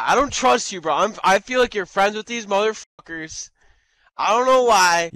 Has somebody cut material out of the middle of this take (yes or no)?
no